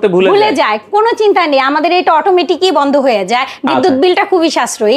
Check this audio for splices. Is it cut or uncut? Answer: uncut